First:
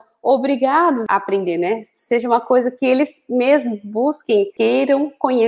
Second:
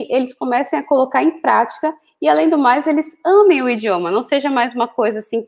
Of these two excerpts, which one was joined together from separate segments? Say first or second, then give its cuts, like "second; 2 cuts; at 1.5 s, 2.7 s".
first; 2 cuts; at 1.0 s, 4.5 s